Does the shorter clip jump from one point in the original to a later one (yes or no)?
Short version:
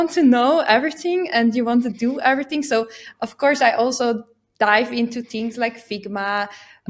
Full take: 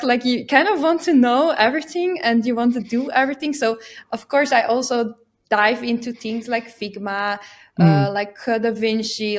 no